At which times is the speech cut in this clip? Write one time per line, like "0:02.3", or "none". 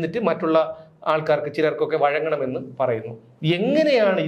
none